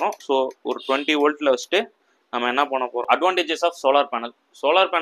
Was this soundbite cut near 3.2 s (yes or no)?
yes